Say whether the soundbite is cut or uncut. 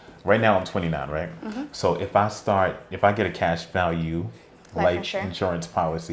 uncut